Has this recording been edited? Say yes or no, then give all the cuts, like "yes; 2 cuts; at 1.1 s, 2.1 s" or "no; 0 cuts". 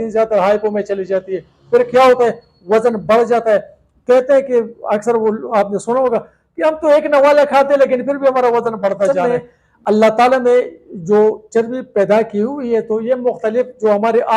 yes; 1 cut; at 9.2 s